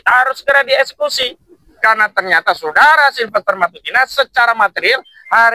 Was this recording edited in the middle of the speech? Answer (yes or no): no